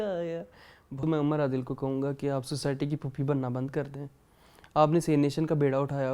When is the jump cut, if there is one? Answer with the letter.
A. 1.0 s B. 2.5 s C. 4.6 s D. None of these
A